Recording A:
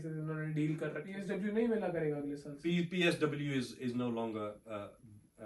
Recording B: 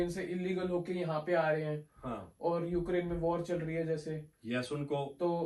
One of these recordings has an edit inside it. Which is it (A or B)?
A